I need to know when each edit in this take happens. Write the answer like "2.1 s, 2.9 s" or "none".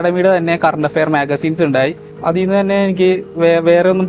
2.1 s